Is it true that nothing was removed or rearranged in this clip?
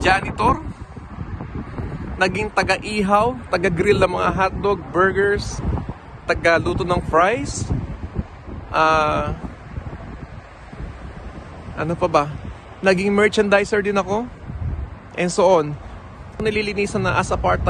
no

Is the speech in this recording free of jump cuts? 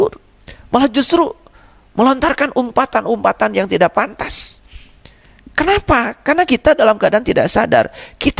yes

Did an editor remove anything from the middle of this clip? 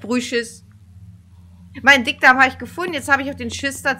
no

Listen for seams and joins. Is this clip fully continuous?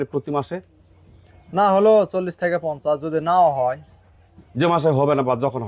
yes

